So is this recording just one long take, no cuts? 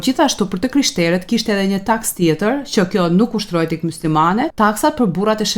no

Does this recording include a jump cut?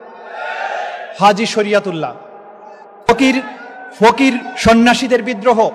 no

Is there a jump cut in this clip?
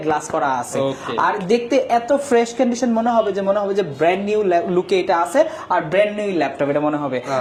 no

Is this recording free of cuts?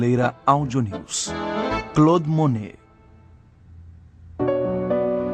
yes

